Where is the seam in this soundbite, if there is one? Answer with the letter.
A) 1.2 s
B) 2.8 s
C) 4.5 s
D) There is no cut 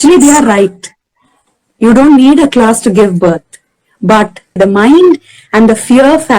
C